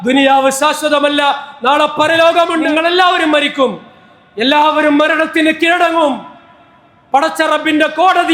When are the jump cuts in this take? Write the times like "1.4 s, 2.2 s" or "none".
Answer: 2.7 s